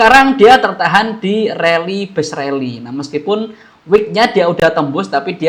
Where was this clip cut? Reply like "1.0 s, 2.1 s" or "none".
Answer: none

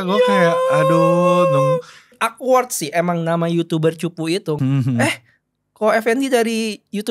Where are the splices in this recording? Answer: 2.1 s, 4.6 s

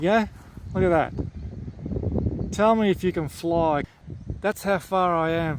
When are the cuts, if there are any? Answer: 3.9 s

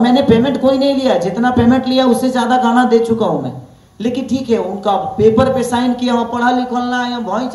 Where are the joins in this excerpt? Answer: none

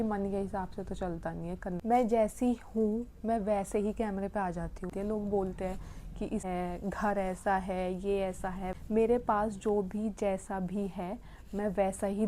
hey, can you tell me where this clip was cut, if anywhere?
1.8 s, 4.9 s, 6.4 s, 8.7 s

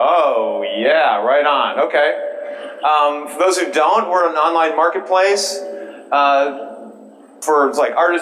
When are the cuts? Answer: 1.4 s

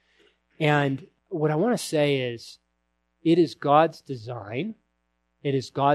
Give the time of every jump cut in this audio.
1.1 s

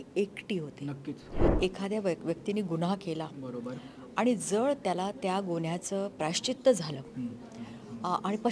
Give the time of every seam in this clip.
1.4 s

